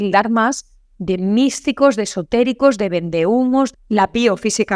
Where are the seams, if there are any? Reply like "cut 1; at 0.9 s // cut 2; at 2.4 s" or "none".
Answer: cut 1; at 3.8 s